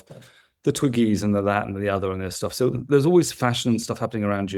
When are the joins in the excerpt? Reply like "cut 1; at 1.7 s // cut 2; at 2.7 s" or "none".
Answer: none